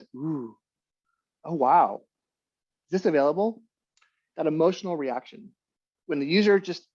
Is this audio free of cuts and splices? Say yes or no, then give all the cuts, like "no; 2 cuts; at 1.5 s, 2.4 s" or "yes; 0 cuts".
no; 1 cut; at 5.9 s